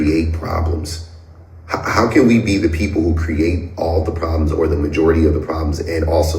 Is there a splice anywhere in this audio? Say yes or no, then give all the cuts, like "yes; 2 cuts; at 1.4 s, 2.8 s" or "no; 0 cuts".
yes; 1 cut; at 2.6 s